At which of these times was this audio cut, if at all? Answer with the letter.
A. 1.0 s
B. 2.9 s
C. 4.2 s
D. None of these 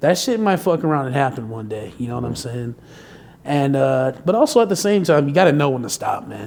D